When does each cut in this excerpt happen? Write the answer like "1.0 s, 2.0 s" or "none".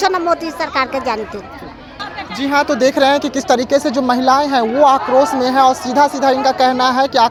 none